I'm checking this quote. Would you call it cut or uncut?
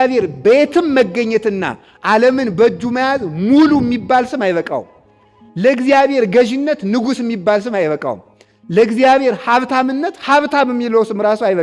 uncut